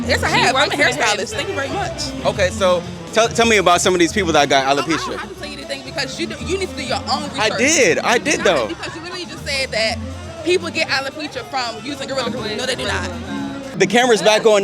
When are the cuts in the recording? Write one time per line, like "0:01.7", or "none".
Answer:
0:13.7